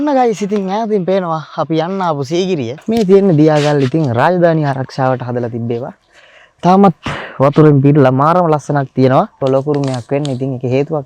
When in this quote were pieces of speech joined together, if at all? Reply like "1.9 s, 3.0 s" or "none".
2.8 s, 9.3 s